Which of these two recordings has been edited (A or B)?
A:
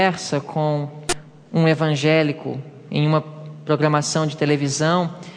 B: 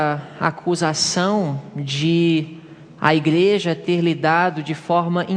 A